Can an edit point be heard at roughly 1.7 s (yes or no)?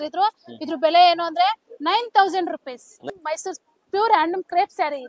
no